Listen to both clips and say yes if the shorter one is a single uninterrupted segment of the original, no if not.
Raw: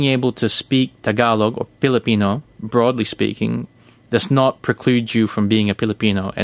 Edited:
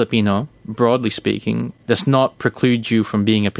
no